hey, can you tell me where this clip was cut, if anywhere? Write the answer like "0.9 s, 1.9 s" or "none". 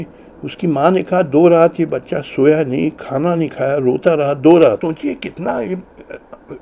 4.8 s